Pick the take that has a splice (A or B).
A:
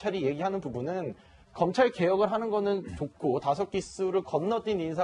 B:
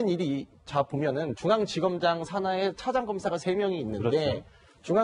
A